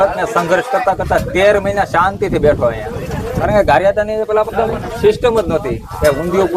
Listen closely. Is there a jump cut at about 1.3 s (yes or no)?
no